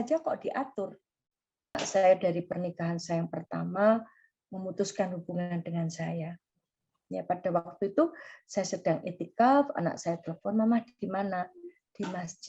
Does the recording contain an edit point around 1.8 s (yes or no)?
yes